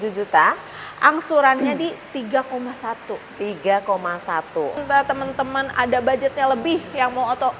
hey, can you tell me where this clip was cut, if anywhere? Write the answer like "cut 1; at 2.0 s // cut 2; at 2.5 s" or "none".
cut 1; at 4.8 s

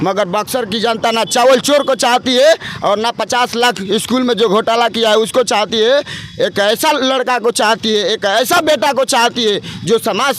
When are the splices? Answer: none

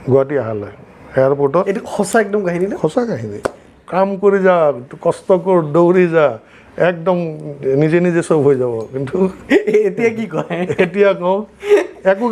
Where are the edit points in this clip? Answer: cut 1; at 3.8 s

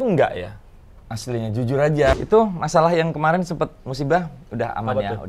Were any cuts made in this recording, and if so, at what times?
cut 1; at 2.2 s

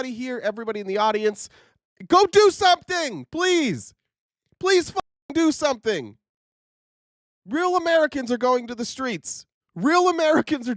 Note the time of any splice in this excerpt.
cut 1; at 1.7 s

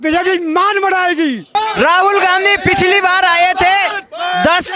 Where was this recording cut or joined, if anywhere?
cut 1; at 1.5 s

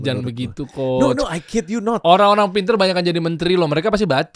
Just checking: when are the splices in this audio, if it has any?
none

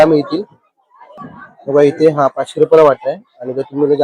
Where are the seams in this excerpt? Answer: cut 1; at 1.1 s

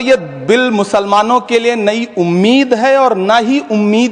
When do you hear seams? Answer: none

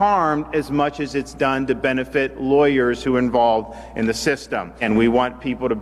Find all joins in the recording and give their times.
cut 1; at 4.8 s

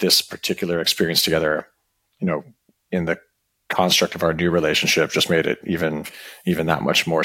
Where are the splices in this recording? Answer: none

